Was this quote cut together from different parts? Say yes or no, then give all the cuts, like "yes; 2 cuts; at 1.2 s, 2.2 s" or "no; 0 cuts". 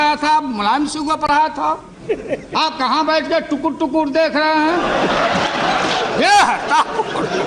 yes; 2 cuts; at 1.9 s, 6.1 s